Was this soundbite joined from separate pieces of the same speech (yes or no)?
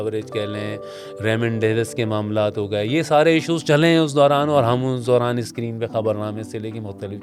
no